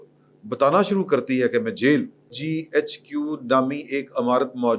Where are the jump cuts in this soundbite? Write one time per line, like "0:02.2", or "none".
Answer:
0:02.4